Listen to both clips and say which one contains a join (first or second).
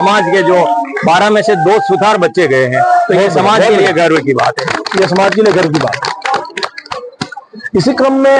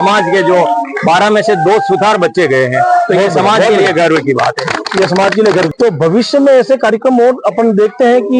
second